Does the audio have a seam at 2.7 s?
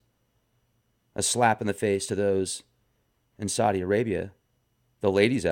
no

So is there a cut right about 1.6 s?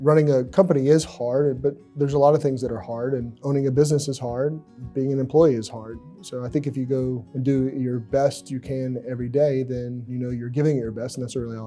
no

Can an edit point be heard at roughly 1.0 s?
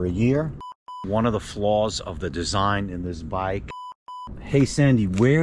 yes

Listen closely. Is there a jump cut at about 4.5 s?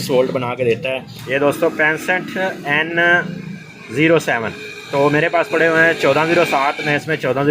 no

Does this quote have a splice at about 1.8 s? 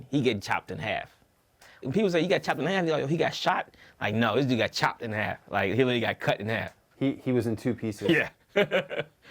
yes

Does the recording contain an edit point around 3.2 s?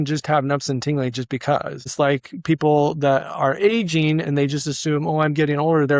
no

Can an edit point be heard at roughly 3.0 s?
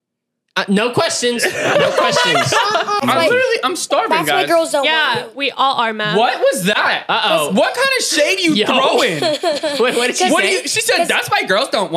yes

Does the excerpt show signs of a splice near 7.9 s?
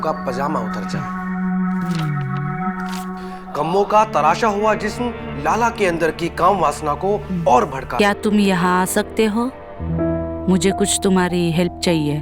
yes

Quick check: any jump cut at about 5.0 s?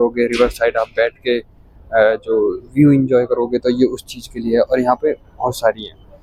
no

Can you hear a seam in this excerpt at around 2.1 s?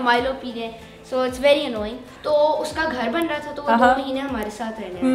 yes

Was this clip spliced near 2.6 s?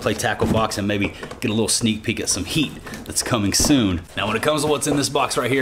no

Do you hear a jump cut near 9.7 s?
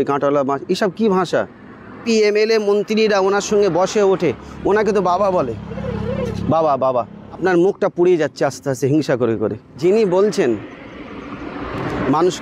yes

